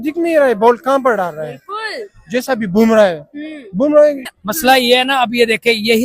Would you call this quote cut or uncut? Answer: cut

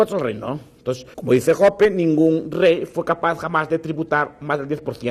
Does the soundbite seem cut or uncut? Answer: cut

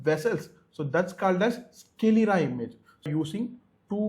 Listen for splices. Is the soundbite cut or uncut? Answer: cut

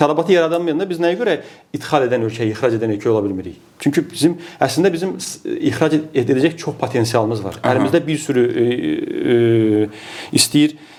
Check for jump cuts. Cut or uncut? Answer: uncut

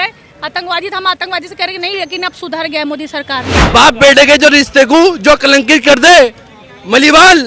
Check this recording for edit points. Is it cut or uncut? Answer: cut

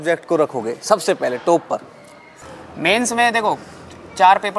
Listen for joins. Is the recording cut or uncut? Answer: uncut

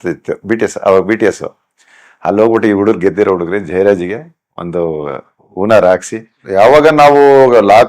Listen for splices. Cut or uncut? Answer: cut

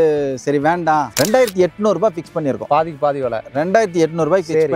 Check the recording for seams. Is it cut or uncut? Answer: cut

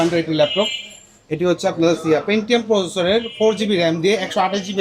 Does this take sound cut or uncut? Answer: uncut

